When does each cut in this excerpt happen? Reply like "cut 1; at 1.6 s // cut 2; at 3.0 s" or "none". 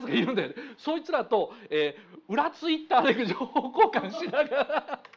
none